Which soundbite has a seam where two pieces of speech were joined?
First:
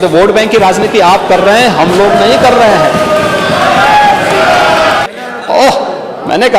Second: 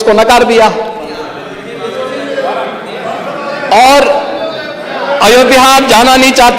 first; 1 cut; at 5.0 s

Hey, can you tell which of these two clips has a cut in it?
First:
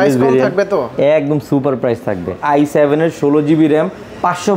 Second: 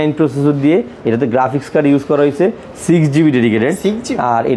first; 1 cut; at 2.4 s

